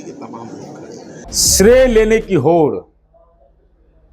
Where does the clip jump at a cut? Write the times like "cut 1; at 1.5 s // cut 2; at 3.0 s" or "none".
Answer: cut 1; at 1.2 s

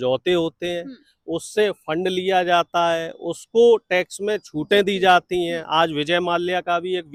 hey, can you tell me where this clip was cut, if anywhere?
none

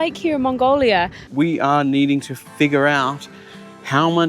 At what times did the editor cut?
cut 1; at 1.3 s

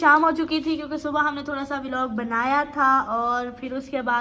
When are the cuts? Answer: none

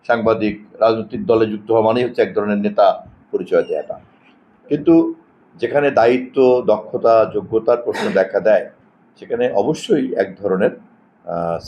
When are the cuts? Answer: none

